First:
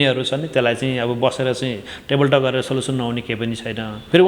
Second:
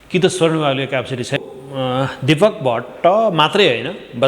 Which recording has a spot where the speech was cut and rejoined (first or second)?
second